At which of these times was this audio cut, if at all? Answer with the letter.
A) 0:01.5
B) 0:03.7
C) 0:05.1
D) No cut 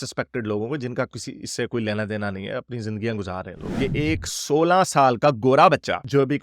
B